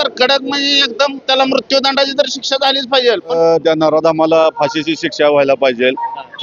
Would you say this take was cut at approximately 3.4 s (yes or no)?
yes